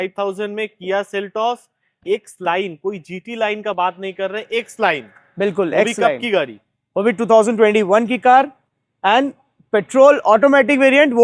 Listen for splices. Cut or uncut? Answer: uncut